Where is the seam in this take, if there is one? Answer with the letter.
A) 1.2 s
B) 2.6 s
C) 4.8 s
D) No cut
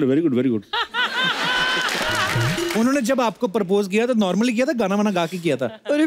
B